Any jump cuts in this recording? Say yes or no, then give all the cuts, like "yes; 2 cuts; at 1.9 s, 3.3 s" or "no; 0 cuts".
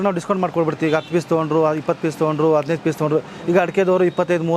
no; 0 cuts